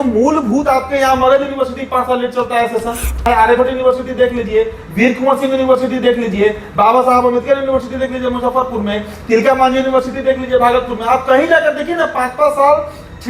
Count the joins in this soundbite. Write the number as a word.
one